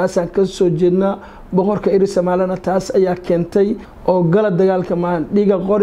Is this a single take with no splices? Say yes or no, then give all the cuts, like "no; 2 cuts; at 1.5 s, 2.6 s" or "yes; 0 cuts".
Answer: no; 1 cut; at 3.9 s